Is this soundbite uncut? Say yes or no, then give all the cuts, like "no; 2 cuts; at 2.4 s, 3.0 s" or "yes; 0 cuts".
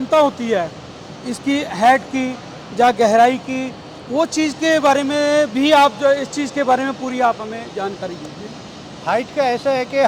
yes; 0 cuts